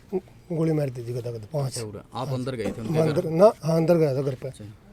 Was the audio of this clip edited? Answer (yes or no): no